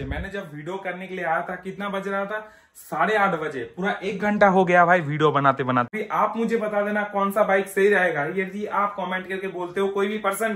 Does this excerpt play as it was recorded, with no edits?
no; 1 cut; at 5.9 s

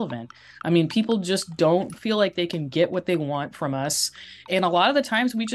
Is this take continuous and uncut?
no; 2 cuts; at 1.9 s, 4.5 s

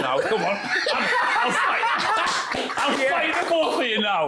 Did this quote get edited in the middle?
no; 0 cuts

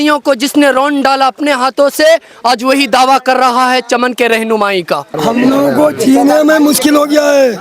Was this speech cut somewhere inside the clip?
yes; 1 cut; at 5.1 s

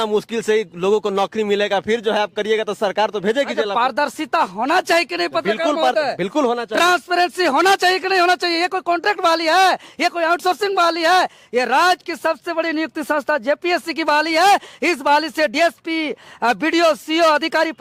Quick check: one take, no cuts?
yes; 0 cuts

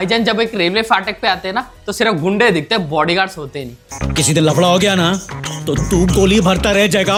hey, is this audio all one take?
yes; 0 cuts

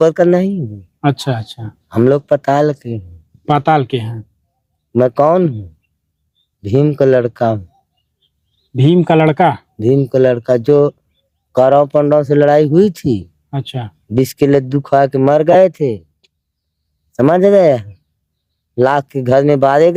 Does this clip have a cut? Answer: no; 0 cuts

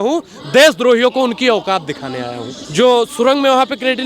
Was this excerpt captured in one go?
no; 1 cut; at 2.6 s

